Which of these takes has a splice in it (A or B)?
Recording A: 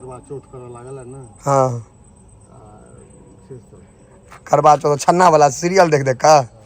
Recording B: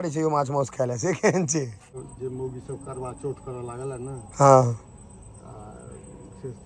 B